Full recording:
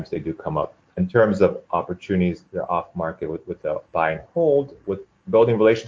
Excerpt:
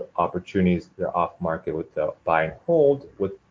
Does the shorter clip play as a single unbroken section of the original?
no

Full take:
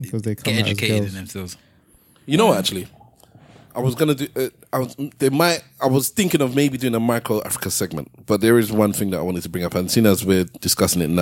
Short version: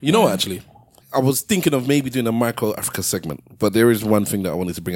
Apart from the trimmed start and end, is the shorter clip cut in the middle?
yes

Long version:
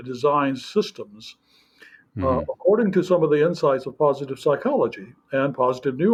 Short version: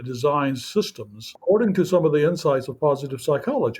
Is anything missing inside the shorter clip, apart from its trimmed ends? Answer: yes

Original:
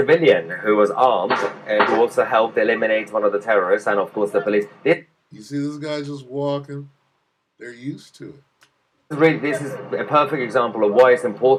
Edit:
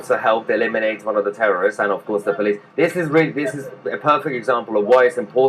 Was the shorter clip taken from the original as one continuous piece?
no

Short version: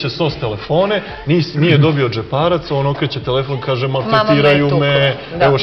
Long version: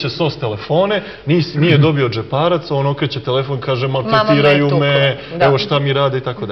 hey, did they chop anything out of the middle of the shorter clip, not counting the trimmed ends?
no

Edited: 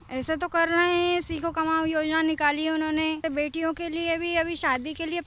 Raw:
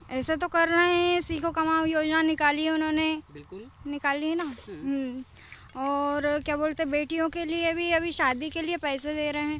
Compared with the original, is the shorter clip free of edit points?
no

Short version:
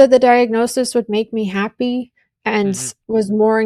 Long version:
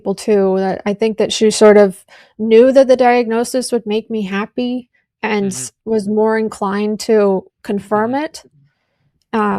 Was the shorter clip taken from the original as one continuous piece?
yes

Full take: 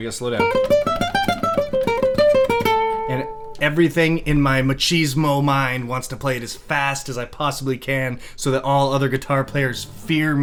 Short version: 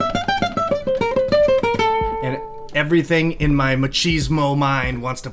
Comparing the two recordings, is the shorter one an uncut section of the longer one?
yes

